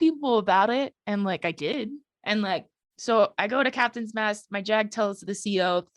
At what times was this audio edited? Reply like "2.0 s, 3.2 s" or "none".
2.1 s, 2.8 s